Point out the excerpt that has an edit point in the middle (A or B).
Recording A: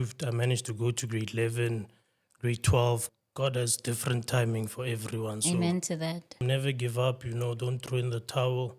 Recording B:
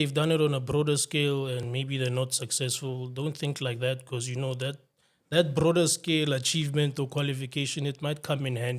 A